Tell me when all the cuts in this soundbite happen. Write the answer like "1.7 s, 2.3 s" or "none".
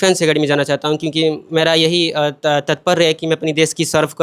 none